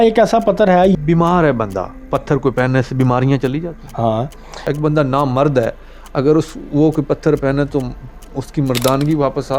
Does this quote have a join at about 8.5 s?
no; 2 cuts; at 0.9 s, 4.5 s

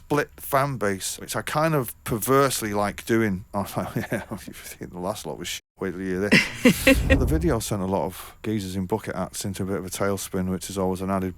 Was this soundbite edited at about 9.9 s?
no; 4 cuts; at 1.2 s, 3.4 s, 7.2 s, 8.4 s

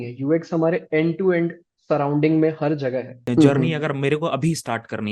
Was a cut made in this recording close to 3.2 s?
yes; 1 cut; at 3.2 s

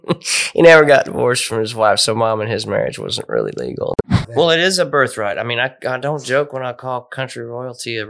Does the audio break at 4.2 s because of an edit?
yes; 1 cut; at 4.2 s

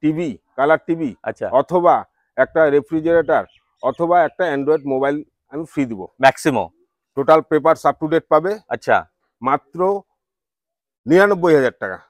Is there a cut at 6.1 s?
yes; 1 cut; at 6.1 s

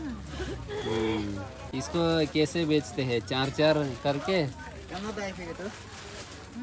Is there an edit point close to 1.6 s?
yes; 1 cut; at 1.6 s

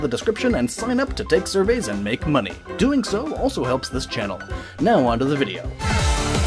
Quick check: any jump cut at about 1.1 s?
no; 0 cuts

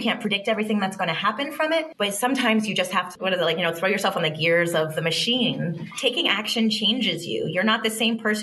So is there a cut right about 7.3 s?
no; 2 cuts; at 1.9 s, 5.9 s

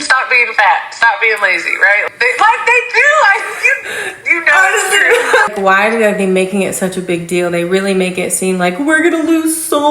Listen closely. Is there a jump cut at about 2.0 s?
yes; 2 cuts; at 2.0 s, 5.5 s

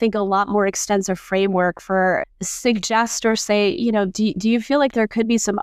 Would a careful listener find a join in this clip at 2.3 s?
yes; 1 cut; at 2.3 s

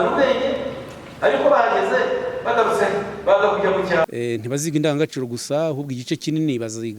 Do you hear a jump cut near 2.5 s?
no; 1 cut; at 4.0 s

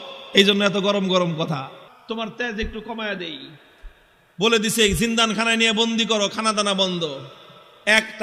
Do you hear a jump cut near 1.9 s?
yes; 1 cut; at 1.9 s

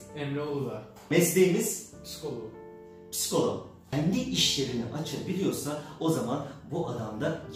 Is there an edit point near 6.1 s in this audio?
no; 2 cuts; at 1.1 s, 3.8 s

